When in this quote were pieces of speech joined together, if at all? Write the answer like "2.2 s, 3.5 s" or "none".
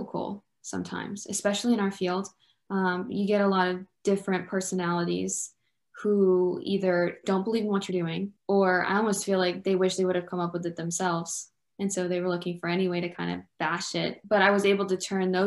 8.3 s, 14.2 s